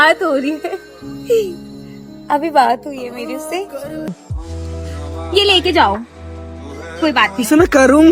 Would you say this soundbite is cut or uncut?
cut